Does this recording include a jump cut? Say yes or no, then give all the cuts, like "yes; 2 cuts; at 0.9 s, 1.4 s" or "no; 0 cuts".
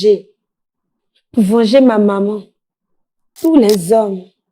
yes; 1 cut; at 3.3 s